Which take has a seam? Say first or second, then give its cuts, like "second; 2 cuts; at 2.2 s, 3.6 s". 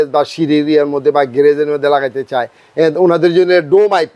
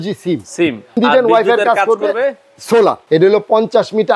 second; 2 cuts; at 1.0 s, 3.0 s